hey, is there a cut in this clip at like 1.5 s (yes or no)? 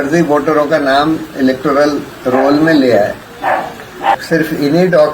no